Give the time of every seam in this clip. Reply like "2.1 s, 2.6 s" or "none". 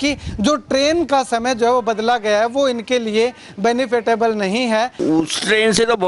5.0 s

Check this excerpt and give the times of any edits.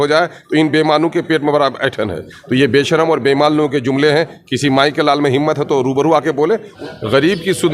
6.7 s

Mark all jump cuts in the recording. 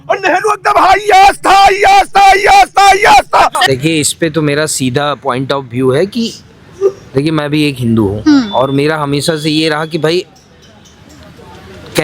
3.6 s

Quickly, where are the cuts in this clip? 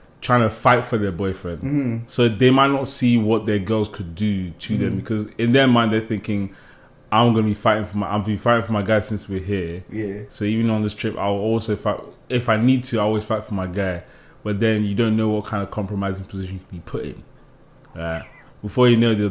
none

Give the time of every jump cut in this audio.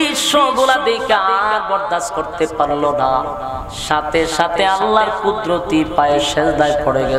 none

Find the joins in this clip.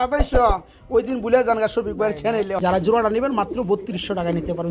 2.5 s

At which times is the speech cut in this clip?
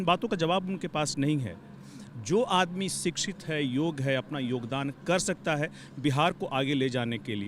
none

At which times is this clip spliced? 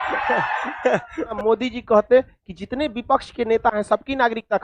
1.3 s

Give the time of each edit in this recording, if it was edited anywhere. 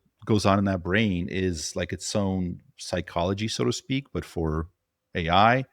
none

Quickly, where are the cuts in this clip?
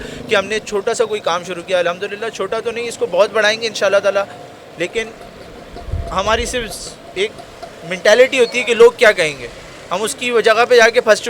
none

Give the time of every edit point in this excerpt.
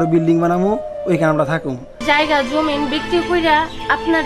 2.0 s

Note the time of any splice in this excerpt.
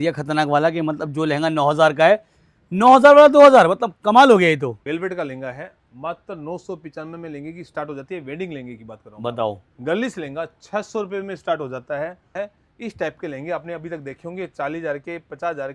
4.8 s, 9.7 s, 12.3 s

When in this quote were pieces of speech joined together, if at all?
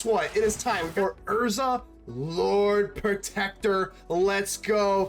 0.9 s

